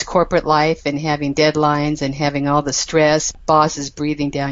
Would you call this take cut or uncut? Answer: cut